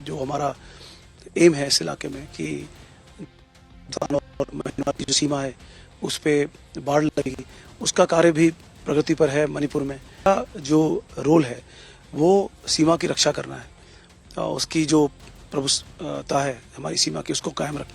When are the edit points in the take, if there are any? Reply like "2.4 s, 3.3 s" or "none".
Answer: 10.3 s